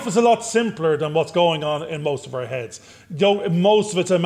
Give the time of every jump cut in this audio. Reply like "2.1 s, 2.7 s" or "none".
none